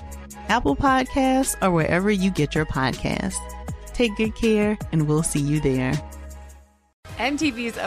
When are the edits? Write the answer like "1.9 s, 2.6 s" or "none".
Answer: 6.9 s

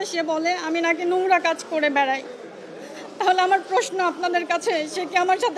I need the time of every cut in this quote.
none

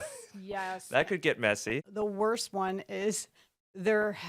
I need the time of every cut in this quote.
1.9 s

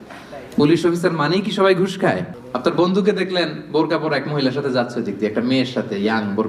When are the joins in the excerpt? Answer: 2.3 s

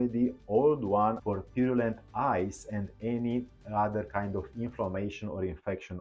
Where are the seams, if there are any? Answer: 1.2 s

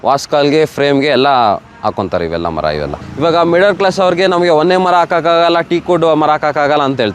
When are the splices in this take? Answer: 3.0 s

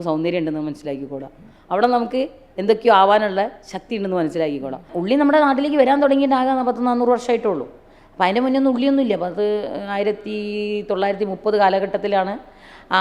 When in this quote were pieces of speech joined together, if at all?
4.9 s

